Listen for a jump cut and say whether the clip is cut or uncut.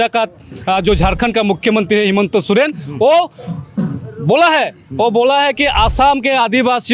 uncut